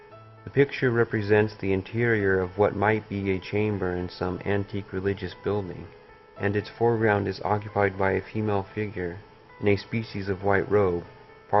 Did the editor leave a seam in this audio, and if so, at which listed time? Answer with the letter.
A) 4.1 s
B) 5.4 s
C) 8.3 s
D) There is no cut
A